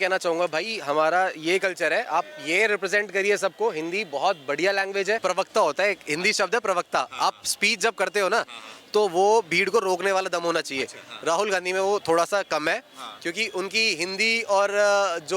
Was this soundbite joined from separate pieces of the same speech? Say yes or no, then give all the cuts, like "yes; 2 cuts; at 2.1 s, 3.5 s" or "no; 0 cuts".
yes; 1 cut; at 5.2 s